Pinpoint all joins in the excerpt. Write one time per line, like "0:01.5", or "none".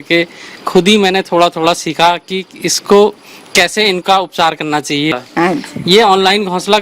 0:05.1